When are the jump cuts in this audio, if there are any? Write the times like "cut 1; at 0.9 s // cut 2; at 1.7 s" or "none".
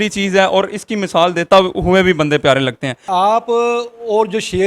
cut 1; at 3.0 s